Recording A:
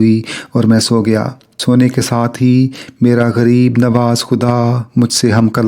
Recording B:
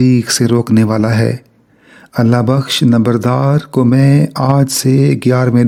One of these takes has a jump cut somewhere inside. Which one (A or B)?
A